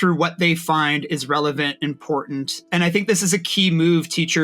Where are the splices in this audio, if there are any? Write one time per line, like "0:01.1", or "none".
0:02.6